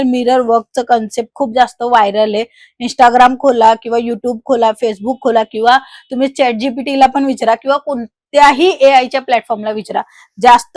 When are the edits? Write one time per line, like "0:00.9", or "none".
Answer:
none